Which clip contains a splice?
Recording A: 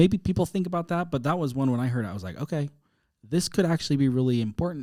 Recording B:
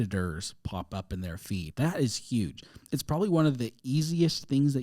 B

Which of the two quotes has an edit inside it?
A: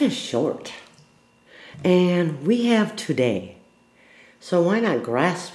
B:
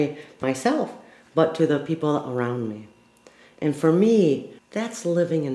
B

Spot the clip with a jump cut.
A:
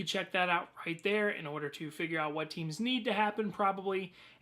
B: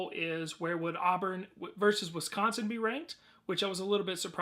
B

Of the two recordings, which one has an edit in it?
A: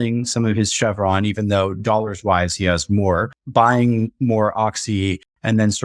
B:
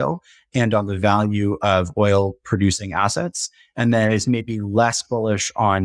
A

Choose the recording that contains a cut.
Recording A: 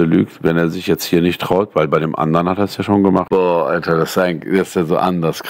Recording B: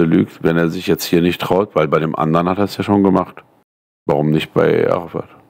A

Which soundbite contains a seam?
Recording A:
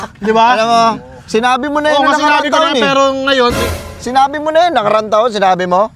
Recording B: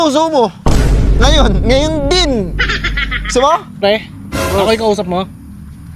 B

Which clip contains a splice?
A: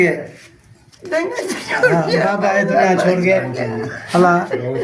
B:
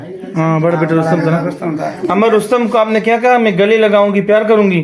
B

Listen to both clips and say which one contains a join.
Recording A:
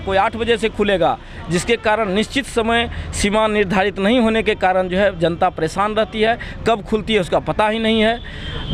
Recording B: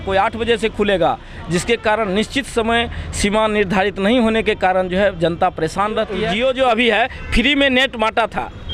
B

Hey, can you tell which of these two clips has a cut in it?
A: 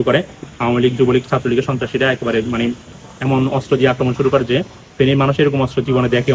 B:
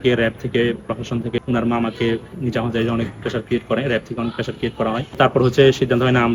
B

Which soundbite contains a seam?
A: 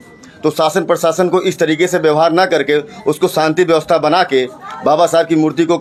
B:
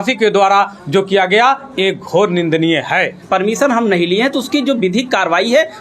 B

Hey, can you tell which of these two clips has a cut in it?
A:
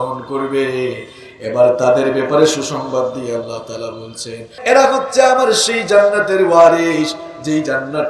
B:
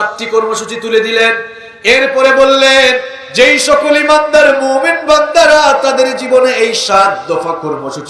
A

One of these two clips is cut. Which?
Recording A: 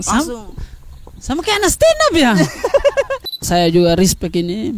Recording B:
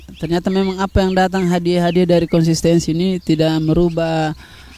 A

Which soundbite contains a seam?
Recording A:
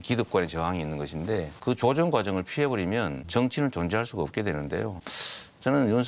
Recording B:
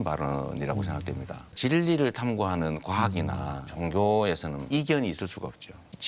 B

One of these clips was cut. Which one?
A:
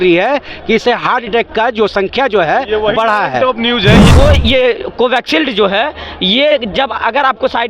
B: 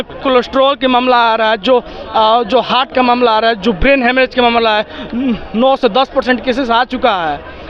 A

